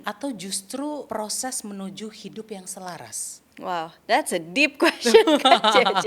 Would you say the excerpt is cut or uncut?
cut